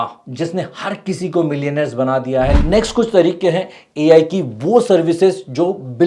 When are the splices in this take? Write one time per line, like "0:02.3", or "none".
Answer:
0:02.6